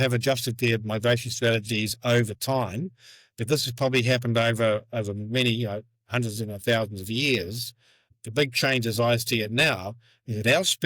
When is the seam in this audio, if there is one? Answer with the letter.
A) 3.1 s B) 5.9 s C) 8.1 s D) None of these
C